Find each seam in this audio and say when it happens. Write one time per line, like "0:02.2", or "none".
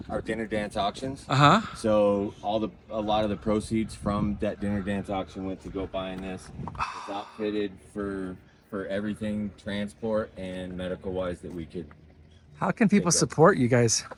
none